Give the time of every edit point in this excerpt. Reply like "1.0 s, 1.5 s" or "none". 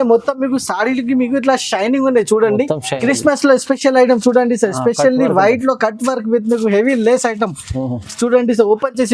3.0 s